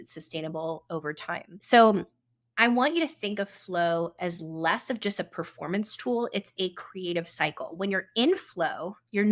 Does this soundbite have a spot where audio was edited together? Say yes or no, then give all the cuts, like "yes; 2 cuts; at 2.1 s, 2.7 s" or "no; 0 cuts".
yes; 1 cut; at 1.5 s